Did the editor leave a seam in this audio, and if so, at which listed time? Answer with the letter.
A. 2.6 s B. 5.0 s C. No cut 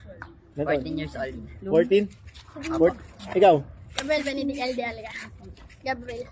A